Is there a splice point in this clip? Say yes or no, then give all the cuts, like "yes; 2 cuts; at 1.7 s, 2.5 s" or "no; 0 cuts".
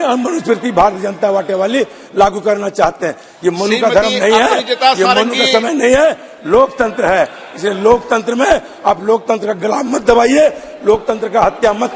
no; 0 cuts